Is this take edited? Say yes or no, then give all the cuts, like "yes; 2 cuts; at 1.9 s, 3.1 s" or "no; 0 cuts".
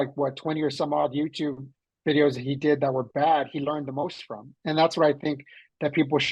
no; 0 cuts